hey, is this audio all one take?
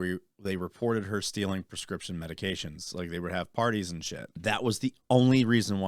no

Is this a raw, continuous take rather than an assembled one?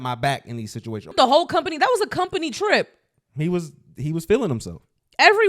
no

